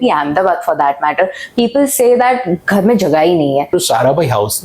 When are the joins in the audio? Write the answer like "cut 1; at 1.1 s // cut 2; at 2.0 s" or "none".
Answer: cut 1; at 3.7 s

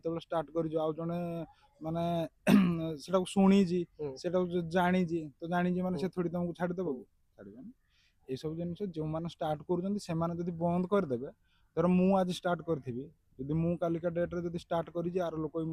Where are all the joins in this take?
none

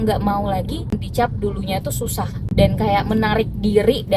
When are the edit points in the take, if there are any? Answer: cut 1; at 0.9 s // cut 2; at 2.4 s

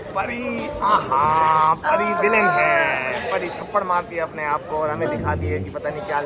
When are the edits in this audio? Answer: none

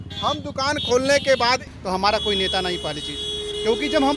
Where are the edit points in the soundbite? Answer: cut 1; at 1.6 s

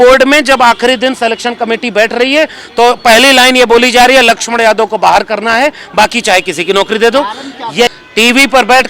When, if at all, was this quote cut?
cut 1; at 7.9 s

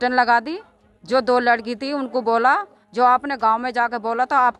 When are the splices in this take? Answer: none

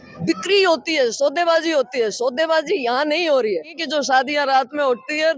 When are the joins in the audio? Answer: cut 1; at 3.8 s

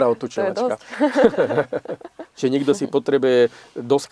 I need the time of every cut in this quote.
cut 1; at 2.2 s

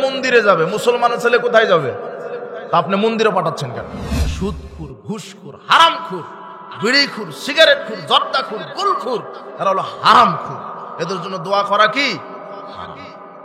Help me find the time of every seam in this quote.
cut 1; at 4.3 s

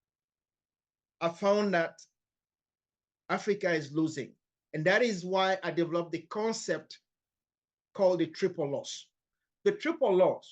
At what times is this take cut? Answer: cut 1; at 9.3 s

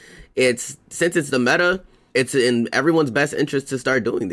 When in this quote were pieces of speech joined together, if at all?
cut 1; at 1.9 s

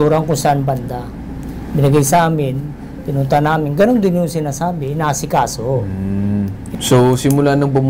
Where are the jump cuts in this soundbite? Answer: cut 1; at 6.6 s

